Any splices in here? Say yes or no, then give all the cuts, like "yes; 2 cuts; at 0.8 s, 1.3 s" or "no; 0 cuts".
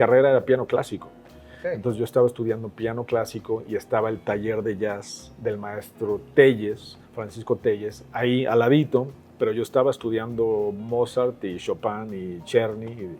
no; 0 cuts